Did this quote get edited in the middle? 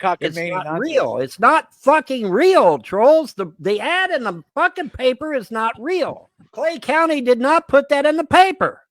yes; 1 cut; at 6.2 s

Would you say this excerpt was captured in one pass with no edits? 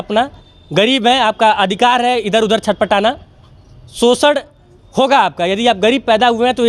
yes; 0 cuts

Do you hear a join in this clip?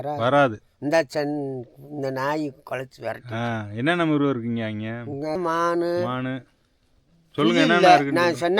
yes; 1 cut; at 5.4 s

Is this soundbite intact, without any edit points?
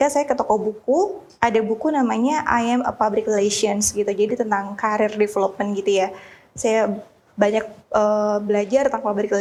yes; 0 cuts

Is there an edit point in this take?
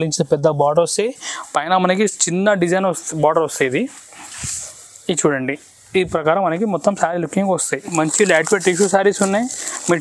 yes; 1 cut; at 7.9 s

